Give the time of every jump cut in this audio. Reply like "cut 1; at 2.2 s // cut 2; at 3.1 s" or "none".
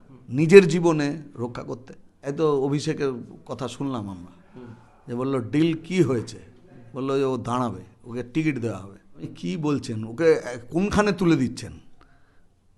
cut 1; at 2.1 s // cut 2; at 9.3 s